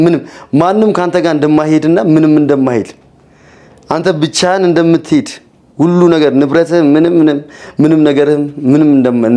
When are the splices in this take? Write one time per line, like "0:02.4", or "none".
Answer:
none